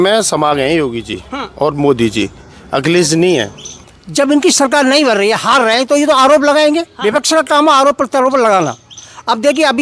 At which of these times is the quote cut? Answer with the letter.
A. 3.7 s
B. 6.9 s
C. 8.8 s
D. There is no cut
A